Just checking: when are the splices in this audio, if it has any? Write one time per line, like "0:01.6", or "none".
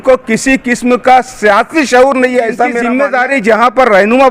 0:02.8